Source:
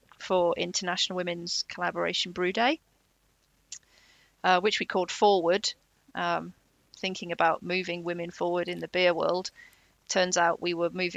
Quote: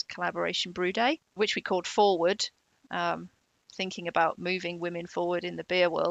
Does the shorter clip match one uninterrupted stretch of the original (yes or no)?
no